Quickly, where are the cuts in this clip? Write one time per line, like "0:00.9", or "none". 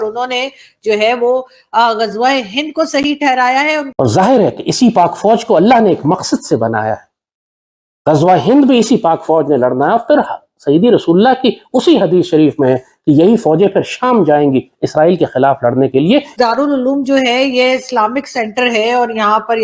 0:03.9
0:16.3